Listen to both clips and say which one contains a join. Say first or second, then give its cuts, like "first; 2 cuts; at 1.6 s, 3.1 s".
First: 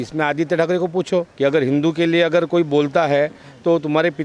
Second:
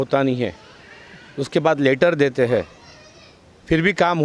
first; 1 cut; at 1.3 s